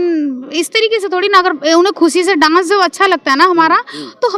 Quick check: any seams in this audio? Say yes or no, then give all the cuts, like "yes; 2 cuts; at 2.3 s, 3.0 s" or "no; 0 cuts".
no; 0 cuts